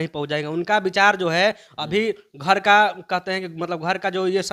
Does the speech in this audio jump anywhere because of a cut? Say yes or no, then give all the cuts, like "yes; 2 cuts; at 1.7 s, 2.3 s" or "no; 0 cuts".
no; 0 cuts